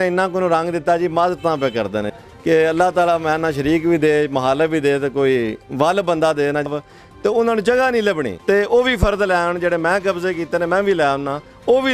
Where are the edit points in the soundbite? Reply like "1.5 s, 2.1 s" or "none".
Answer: 2.1 s, 6.7 s, 8.3 s